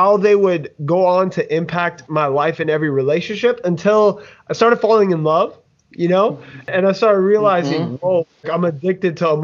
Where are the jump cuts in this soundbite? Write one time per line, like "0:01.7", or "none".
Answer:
0:06.7
0:08.4